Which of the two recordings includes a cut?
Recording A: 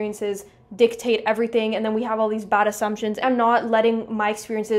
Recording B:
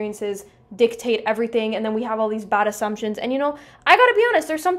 A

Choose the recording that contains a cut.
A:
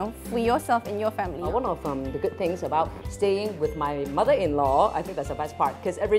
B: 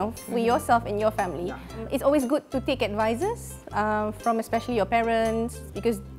A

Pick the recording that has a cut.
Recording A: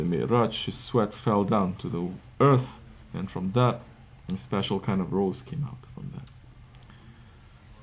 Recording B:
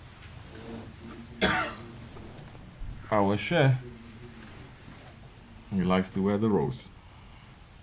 B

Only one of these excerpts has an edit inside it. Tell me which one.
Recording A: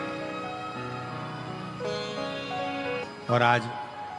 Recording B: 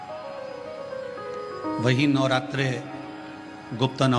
A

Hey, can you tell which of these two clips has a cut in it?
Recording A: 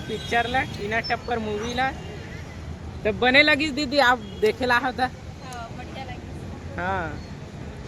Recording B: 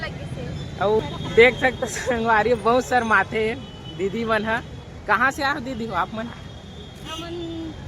B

